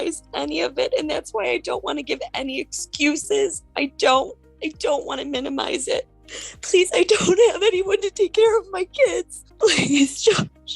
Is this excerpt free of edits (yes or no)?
no